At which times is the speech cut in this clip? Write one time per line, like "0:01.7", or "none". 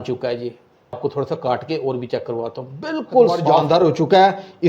0:01.0
0:03.6